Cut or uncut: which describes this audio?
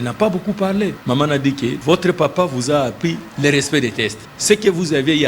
cut